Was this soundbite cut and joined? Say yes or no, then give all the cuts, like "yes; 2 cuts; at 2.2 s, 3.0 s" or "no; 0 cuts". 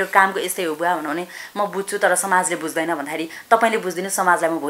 no; 0 cuts